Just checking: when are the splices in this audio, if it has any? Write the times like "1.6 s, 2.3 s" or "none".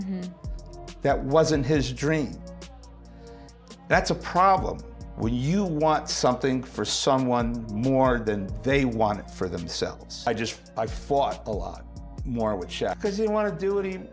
10.1 s, 13.0 s